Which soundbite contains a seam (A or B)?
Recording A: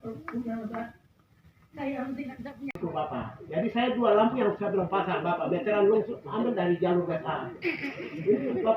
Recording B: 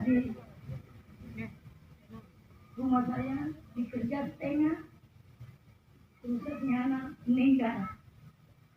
A